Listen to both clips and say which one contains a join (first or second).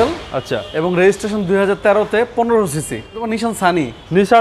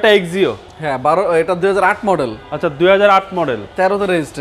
first